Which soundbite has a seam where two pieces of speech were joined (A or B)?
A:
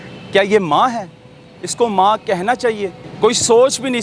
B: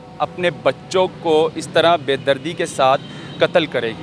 A